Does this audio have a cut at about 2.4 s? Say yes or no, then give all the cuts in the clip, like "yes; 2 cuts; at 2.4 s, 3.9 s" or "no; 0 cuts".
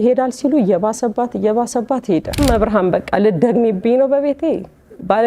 yes; 1 cut; at 2.4 s